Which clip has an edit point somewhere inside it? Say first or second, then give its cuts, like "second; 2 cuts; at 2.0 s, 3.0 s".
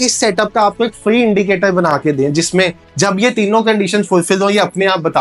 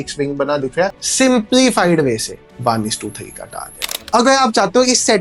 second; 2 cuts; at 1.0 s, 3.9 s